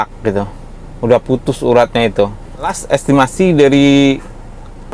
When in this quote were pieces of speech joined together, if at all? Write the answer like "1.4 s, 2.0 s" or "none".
2.8 s

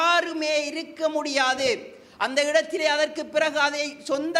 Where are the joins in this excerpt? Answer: none

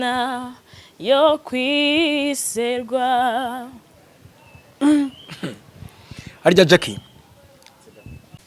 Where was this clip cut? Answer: none

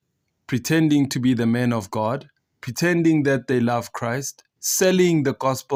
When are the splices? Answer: none

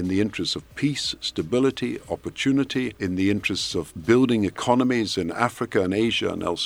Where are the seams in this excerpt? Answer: 2.9 s

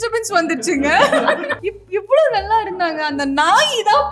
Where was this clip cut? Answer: 1.6 s

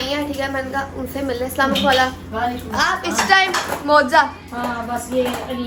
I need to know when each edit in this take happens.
none

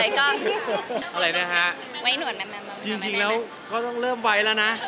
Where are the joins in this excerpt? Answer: 1.0 s

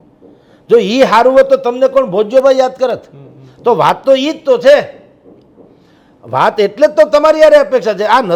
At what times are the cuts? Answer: none

